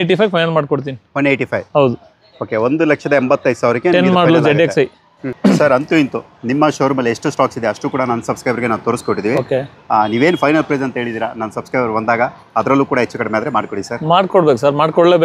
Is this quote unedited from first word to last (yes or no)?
yes